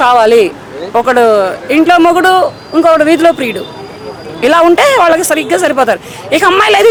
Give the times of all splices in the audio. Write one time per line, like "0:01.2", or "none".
none